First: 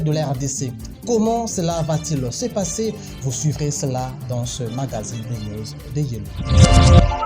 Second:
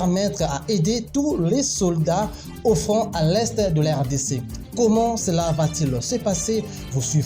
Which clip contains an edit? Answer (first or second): first